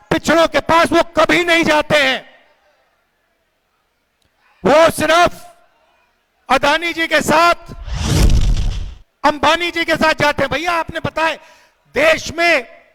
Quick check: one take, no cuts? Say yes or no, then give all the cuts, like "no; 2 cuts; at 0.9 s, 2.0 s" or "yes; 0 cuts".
yes; 0 cuts